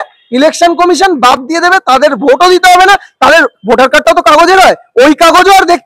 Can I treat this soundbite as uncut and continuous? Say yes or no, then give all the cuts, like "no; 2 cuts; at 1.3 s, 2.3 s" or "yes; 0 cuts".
yes; 0 cuts